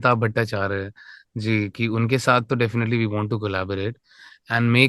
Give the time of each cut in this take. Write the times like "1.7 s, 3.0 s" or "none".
none